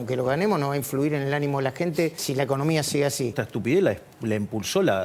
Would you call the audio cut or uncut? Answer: cut